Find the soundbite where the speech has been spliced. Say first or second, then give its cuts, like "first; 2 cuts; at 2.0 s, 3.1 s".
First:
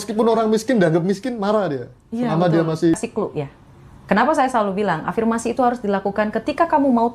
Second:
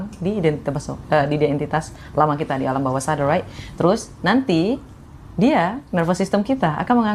first; 1 cut; at 3.0 s